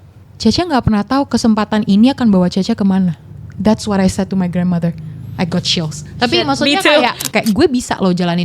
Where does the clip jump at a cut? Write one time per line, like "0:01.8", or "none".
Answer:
0:07.2